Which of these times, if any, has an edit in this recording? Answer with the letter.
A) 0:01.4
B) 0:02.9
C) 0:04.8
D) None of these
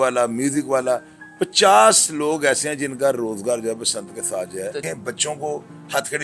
C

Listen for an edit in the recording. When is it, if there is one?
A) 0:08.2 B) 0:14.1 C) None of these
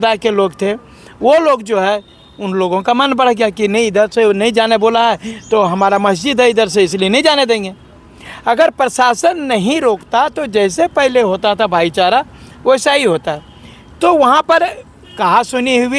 C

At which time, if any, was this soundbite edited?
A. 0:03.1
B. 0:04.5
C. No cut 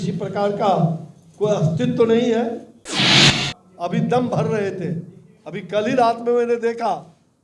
A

